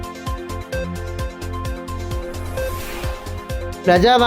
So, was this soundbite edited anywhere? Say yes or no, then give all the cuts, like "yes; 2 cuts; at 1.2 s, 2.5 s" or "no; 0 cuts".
no; 0 cuts